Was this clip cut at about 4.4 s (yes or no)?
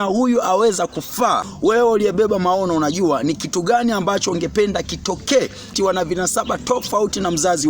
no